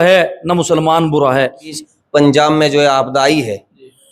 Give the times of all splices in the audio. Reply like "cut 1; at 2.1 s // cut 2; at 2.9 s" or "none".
cut 1; at 1.8 s